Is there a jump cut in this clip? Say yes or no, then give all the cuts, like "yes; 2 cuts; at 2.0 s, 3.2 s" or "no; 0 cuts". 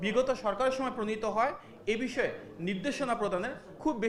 no; 0 cuts